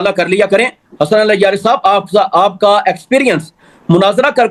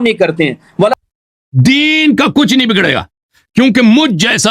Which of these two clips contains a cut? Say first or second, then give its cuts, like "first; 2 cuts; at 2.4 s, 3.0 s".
second; 1 cut; at 0.9 s